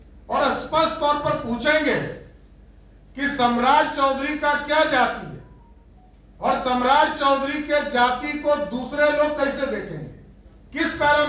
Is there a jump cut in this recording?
no; 0 cuts

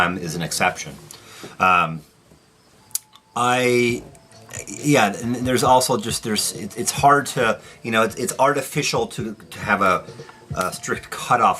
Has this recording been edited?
no; 0 cuts

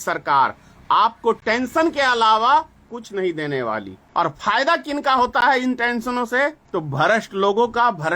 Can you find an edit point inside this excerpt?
yes; 3 cuts; at 3.0 s, 4.0 s, 6.6 s

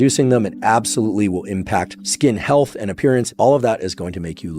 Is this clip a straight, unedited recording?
no; 2 cuts; at 2.0 s, 3.3 s

